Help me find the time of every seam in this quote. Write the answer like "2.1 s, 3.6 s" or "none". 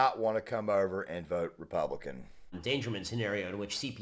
2.6 s